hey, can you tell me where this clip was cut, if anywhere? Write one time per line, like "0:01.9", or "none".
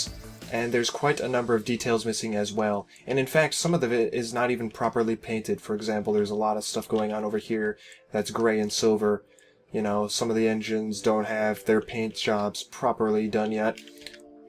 0:12.2